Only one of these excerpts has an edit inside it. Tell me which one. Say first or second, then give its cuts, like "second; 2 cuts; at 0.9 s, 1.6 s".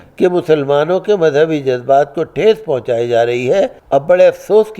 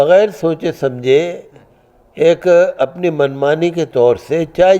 first; 1 cut; at 3.8 s